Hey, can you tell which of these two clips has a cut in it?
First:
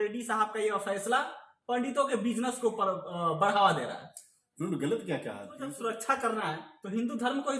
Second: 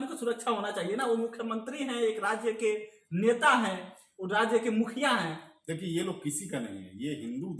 first; 1 cut; at 5.5 s

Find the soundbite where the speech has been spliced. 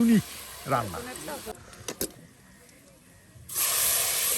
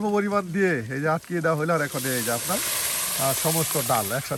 first; 1 cut; at 1.5 s

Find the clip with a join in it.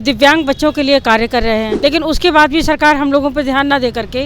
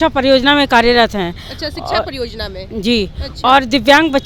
first; 1 cut; at 1.7 s

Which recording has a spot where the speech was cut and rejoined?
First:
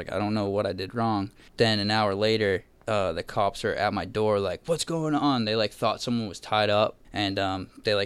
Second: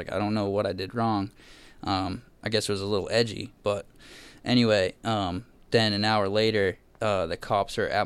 first; 2 cuts; at 1.4 s, 7.0 s

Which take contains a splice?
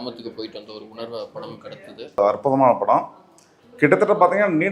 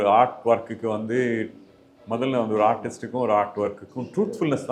first; 1 cut; at 2.2 s

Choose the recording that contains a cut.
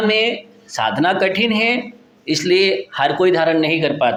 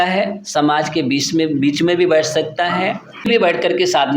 second; 1 cut; at 3.3 s

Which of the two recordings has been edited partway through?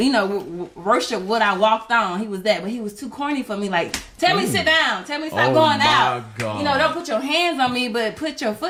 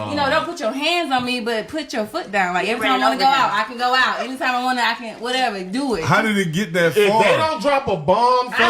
second; 1 cut; at 3.2 s

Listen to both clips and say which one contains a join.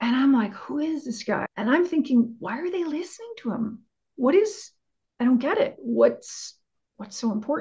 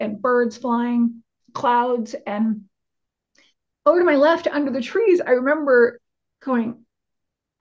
first; 1 cut; at 1.5 s

